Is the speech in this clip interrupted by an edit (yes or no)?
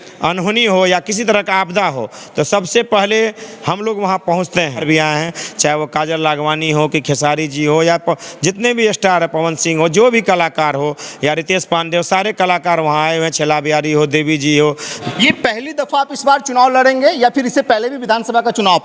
yes